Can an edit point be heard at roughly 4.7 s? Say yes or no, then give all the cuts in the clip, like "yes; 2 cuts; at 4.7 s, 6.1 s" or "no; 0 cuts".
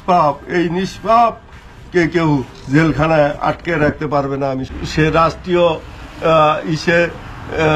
yes; 1 cut; at 4.7 s